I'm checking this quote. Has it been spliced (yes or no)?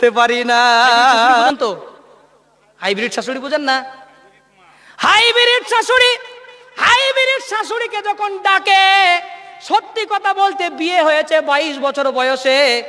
yes